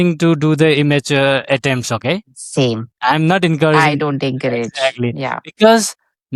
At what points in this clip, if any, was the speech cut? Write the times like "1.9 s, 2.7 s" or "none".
none